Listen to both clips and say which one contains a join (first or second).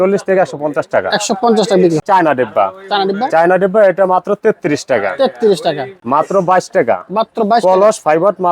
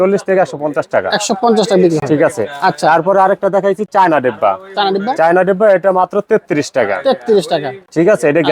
first